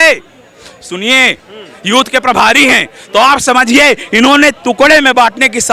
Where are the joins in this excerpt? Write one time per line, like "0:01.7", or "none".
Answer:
0:01.5